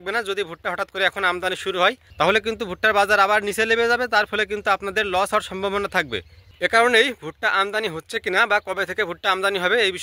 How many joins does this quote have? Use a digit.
0